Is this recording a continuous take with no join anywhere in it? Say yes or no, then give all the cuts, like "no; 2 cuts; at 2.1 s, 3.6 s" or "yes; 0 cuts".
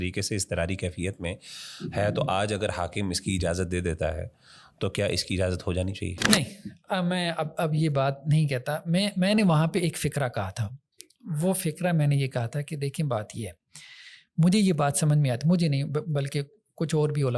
yes; 0 cuts